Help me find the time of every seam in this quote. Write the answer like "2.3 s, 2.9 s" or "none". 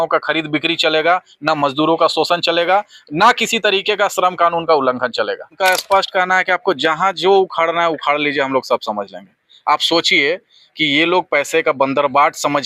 5.5 s

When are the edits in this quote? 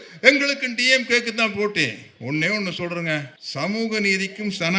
3.4 s

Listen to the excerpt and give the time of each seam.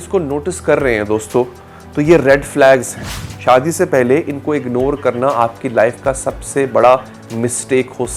none

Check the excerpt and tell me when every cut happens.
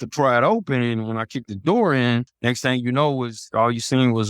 2.3 s

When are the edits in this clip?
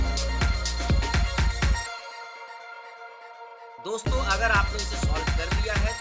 none

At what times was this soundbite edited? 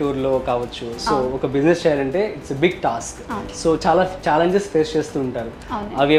none

